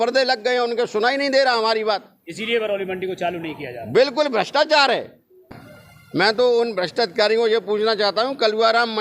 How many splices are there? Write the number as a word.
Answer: one